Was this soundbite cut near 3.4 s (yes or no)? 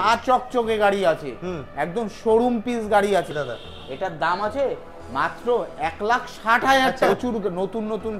yes